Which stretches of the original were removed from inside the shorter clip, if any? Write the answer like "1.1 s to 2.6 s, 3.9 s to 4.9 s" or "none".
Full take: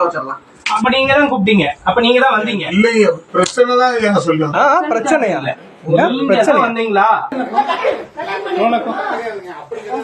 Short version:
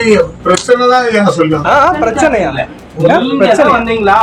none